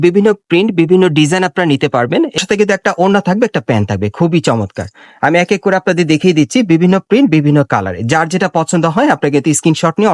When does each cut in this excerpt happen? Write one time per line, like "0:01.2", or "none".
0:02.4